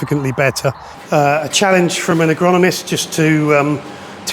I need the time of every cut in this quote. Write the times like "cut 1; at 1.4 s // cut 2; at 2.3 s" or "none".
cut 1; at 0.9 s